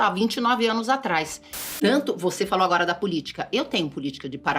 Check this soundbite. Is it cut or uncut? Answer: cut